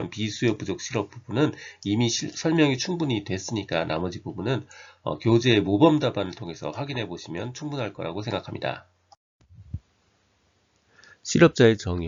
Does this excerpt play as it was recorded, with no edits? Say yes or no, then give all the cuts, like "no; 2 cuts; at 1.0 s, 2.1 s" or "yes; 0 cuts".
yes; 0 cuts